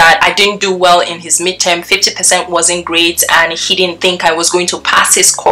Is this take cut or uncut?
uncut